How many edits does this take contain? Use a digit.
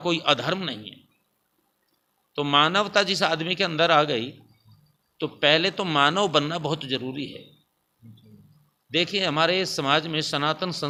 0